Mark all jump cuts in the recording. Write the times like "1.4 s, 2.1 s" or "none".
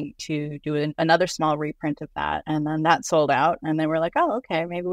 0.9 s, 2.4 s